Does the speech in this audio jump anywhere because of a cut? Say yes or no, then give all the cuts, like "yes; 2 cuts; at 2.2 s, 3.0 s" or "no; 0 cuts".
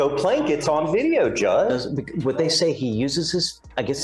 no; 0 cuts